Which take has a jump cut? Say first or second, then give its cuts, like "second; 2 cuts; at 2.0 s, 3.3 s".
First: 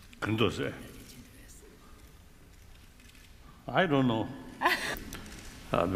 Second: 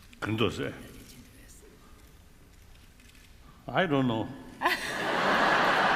second; 1 cut; at 4.9 s